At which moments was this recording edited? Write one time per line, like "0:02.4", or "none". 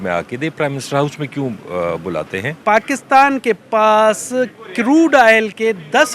0:02.6